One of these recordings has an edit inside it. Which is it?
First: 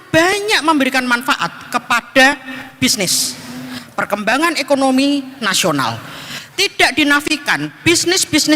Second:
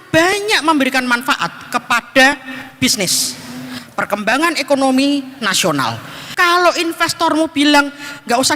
second; 1 cut; at 6.2 s

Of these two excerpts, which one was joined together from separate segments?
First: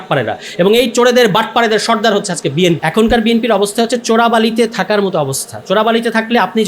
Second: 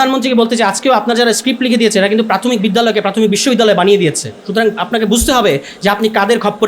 first; 1 cut; at 2.8 s

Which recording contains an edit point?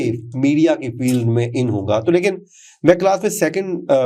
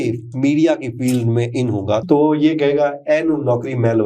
second; 1 cut; at 2.0 s

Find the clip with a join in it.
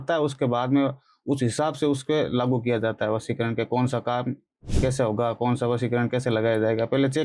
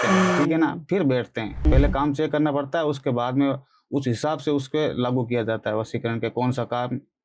second; 1 cut; at 1.6 s

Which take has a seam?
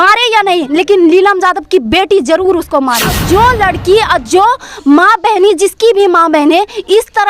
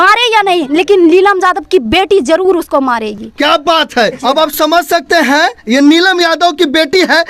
first; 1 cut; at 3.2 s

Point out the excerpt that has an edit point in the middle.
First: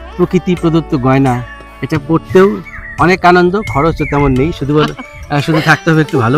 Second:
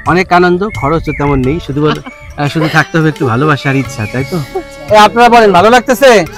second; 1 cut; at 4.6 s

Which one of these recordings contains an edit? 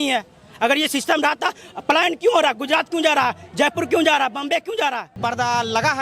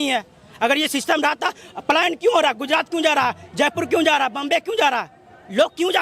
first; 1 cut; at 5.1 s

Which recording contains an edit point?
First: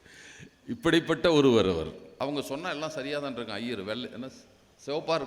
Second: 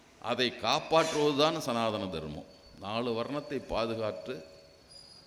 first; 1 cut; at 2.0 s

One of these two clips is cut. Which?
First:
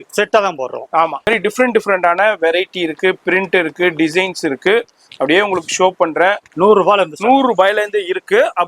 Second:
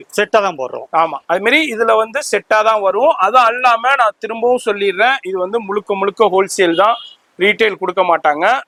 first; 2 cuts; at 1.2 s, 6.5 s

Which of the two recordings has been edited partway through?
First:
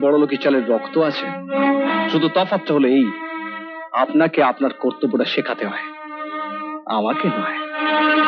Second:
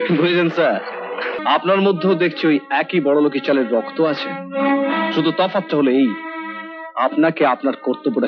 second; 1 cut; at 1.4 s

